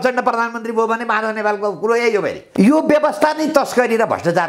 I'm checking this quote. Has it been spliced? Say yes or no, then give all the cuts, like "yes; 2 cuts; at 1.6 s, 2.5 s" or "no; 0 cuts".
yes; 1 cut; at 2.4 s